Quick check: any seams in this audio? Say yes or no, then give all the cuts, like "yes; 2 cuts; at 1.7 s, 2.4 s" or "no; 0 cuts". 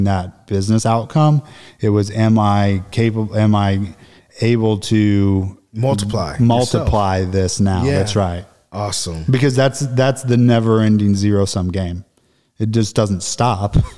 no; 0 cuts